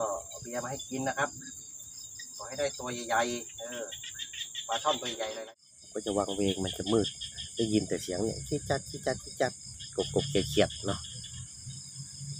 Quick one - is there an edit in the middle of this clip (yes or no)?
yes